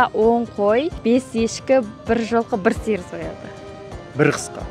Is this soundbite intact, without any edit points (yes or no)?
no